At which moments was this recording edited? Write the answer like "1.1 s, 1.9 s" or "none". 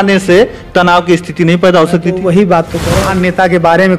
2.8 s